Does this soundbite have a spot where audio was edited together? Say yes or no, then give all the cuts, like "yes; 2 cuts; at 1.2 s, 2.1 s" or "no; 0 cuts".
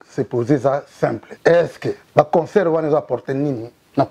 yes; 2 cuts; at 1.3 s, 2.0 s